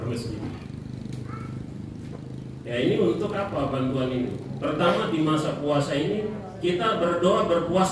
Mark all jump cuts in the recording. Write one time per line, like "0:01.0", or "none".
none